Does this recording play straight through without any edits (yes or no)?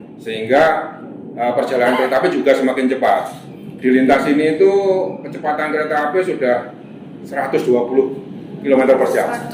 yes